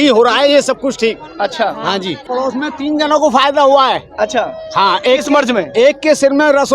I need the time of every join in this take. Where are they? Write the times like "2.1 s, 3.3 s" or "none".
2.2 s